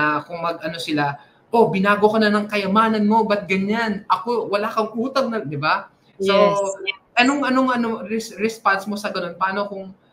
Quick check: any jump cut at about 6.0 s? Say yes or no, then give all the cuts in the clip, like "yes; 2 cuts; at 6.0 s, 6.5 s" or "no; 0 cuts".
no; 0 cuts